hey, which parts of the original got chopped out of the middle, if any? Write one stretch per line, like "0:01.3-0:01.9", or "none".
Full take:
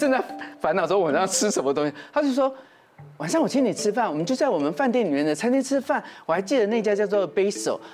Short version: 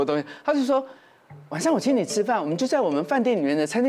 none